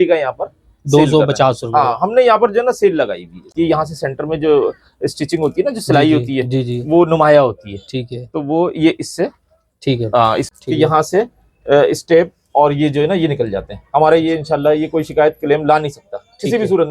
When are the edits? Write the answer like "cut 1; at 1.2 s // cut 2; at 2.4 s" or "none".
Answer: cut 1; at 3.5 s // cut 2; at 10.5 s